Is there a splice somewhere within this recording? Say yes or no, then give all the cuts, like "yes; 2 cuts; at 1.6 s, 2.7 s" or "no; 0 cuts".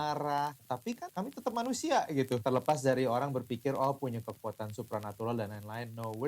yes; 2 cuts; at 0.9 s, 2.4 s